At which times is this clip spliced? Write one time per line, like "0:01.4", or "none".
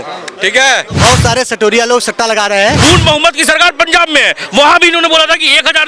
0:00.9
0:02.8

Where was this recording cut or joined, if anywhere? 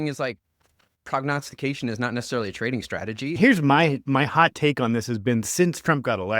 0:03.4

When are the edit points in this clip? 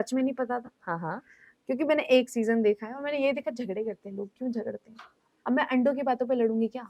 none

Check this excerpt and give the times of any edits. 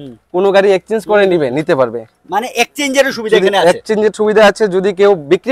none

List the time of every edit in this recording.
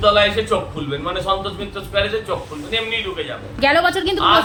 none

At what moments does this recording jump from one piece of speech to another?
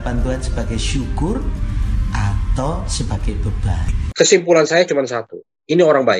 0:04.0

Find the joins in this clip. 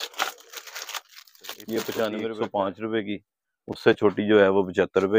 0:02.3

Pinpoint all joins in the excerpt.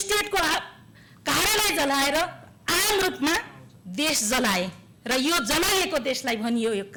none

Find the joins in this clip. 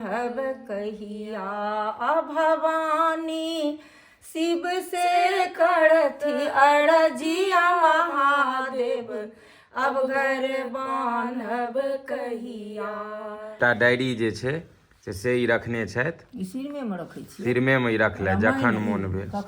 0:13.6

